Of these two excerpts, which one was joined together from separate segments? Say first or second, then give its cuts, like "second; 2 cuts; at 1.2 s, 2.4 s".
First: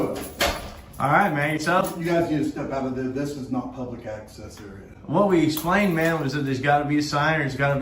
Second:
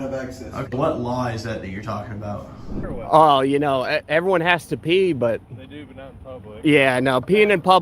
second; 1 cut; at 2.7 s